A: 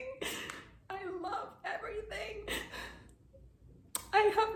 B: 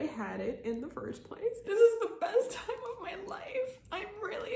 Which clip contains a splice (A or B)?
B